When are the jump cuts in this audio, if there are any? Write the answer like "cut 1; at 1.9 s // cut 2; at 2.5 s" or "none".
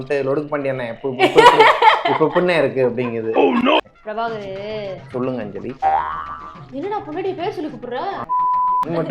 cut 1; at 3.8 s